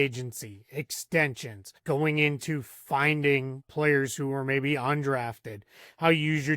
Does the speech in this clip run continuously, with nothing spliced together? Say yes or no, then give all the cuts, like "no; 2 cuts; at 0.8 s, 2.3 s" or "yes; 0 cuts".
no; 2 cuts; at 1.8 s, 3.7 s